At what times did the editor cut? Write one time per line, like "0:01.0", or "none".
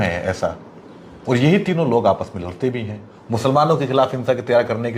none